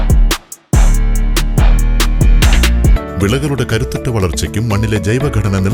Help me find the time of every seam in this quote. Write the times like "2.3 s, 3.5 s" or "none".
3.0 s